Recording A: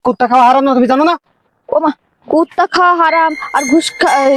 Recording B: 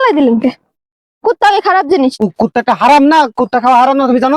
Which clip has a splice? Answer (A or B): B